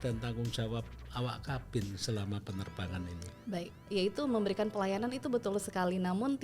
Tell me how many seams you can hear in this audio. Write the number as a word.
one